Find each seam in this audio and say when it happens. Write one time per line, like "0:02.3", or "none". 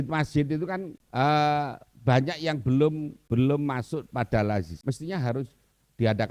0:01.0
0:03.1
0:04.7